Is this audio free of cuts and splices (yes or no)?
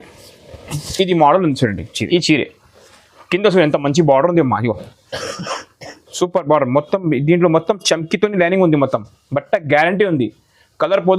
no